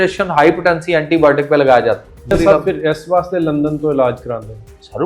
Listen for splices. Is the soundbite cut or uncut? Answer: cut